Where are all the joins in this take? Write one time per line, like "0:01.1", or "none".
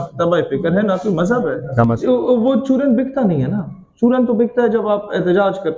0:02.0